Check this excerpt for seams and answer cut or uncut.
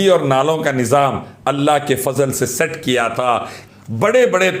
cut